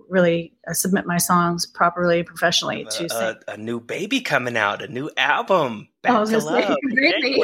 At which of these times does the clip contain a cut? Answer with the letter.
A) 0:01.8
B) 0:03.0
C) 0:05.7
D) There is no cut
B